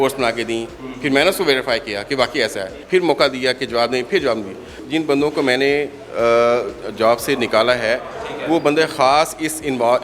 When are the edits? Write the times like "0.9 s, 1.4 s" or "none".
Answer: 2.8 s, 4.8 s